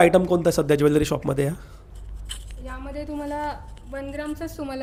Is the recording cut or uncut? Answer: uncut